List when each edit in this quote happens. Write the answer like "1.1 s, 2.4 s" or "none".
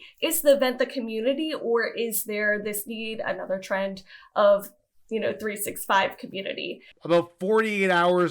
6.9 s

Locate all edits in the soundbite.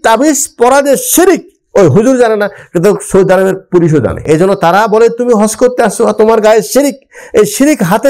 4.2 s

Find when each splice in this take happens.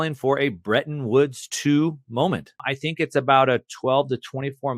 2.6 s

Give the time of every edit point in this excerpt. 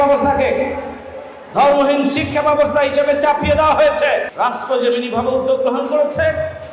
4.3 s

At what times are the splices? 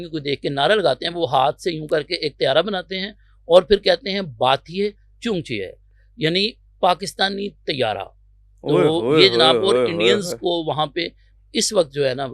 none

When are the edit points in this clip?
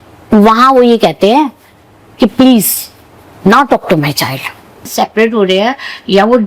4.9 s

